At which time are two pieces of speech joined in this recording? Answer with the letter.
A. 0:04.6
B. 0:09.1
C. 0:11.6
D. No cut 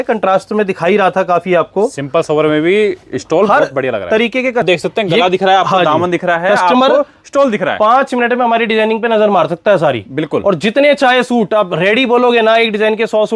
A